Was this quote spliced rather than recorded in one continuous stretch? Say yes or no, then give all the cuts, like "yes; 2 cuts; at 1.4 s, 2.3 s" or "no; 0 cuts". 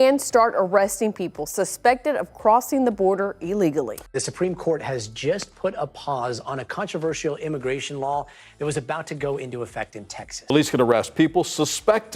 yes; 2 cuts; at 4.0 s, 10.4 s